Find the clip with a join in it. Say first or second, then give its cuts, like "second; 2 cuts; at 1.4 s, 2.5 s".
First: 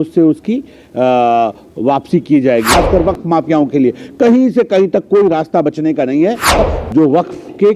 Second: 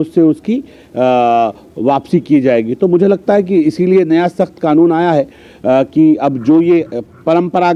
first; 2 cuts; at 2.7 s, 6.6 s